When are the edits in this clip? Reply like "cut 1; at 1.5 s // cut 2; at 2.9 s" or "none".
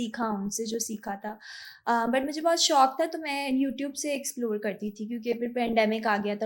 none